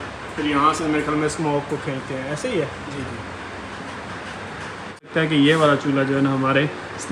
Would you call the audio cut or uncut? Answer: cut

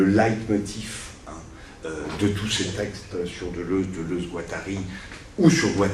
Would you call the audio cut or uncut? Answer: cut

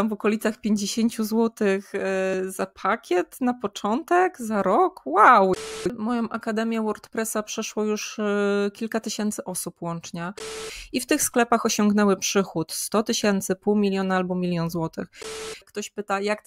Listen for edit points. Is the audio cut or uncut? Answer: cut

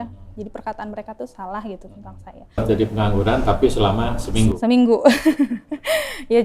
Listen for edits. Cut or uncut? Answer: cut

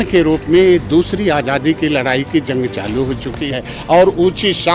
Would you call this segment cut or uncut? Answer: cut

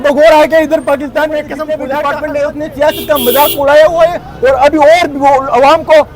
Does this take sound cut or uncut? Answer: cut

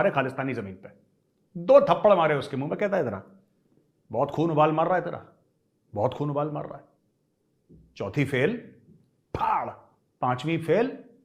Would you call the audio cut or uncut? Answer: uncut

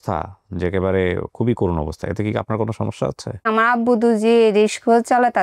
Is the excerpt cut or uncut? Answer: cut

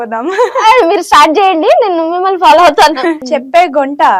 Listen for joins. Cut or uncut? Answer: cut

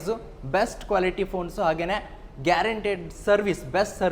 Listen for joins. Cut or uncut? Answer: uncut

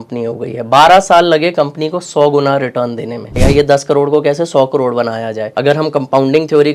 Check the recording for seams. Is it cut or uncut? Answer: cut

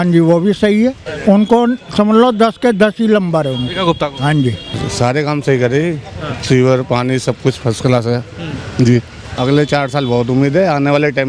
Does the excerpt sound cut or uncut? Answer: cut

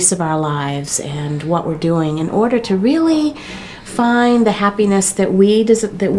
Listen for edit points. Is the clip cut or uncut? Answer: uncut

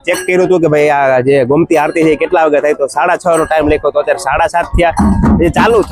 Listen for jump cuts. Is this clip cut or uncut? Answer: uncut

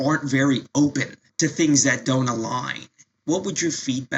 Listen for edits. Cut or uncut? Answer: cut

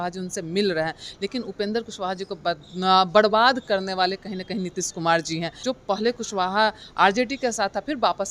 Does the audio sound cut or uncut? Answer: cut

